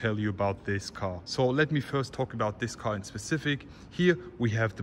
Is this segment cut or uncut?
uncut